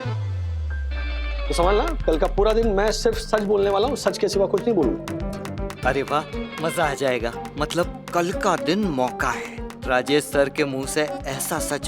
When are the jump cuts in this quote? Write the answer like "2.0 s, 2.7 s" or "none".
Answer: 5.0 s